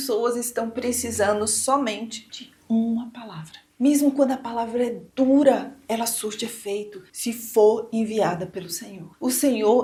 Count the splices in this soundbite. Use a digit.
0